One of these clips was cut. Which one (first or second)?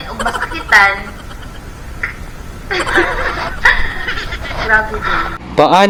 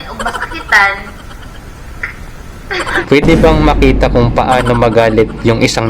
second